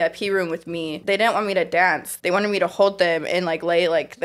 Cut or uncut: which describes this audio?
cut